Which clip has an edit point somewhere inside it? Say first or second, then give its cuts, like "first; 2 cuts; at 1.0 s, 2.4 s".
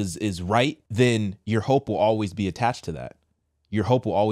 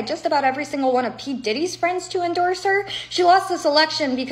first; 2 cuts; at 0.8 s, 1.4 s